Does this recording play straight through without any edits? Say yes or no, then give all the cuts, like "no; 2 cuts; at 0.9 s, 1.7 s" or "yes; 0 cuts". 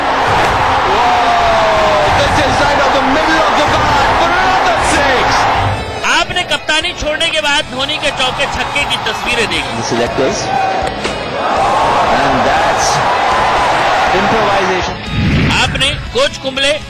yes; 0 cuts